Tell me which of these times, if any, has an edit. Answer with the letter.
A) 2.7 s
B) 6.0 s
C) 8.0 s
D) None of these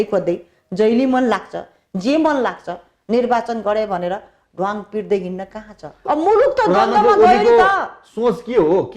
B